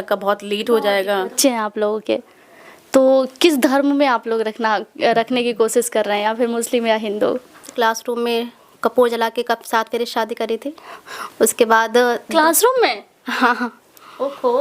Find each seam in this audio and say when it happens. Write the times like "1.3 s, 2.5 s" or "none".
1.4 s, 7.7 s